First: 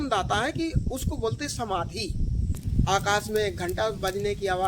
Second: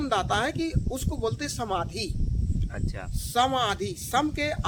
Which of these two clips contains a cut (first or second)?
first